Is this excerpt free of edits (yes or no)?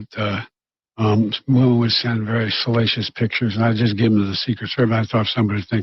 no